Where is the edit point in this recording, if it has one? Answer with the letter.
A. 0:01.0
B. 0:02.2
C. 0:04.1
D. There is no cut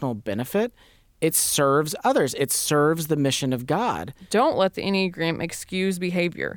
C